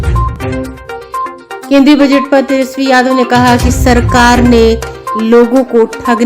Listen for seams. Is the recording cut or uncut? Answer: cut